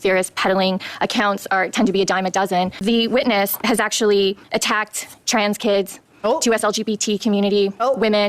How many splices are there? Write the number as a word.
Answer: one